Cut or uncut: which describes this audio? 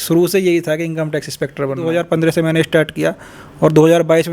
cut